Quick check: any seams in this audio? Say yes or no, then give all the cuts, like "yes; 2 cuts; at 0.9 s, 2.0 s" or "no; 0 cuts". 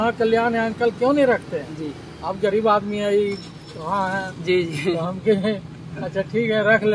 no; 0 cuts